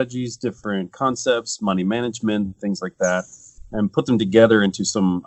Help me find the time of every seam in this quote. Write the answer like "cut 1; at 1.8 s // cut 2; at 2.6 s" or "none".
none